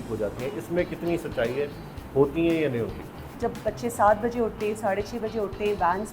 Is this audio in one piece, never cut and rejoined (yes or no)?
no